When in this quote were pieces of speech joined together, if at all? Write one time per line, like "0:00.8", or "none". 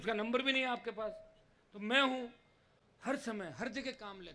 none